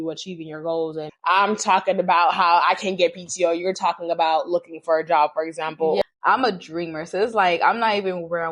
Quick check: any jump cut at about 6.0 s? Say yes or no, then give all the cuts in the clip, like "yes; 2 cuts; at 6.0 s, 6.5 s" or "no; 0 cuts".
yes; 2 cuts; at 1.1 s, 6.0 s